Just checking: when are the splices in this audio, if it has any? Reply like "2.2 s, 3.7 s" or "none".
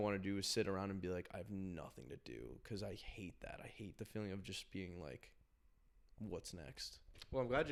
none